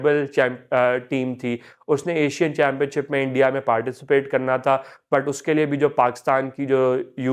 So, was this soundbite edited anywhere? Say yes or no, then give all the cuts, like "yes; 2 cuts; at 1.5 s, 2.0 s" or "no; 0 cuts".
no; 0 cuts